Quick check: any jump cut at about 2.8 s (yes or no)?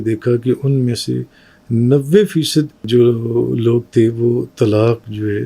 yes